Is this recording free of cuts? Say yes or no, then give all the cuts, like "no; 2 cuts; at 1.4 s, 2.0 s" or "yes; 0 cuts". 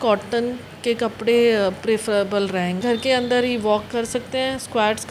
no; 1 cut; at 2.8 s